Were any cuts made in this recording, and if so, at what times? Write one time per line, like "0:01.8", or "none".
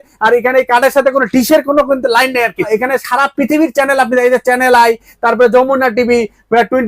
0:02.7